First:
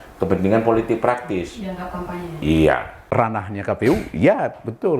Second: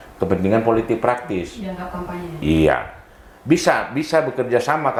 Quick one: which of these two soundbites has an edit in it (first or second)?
first